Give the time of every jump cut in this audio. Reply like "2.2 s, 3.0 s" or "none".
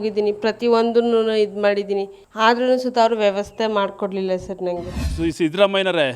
2.2 s, 5.0 s